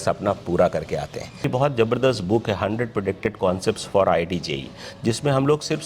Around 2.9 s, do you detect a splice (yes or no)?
no